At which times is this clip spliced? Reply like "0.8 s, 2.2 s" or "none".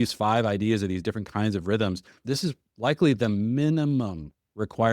2.2 s